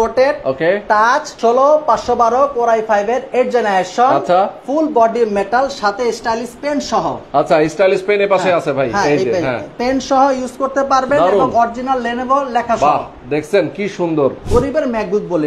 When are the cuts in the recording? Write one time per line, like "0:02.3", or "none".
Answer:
0:01.3
0:14.5